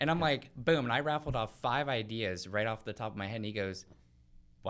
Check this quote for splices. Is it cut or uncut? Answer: uncut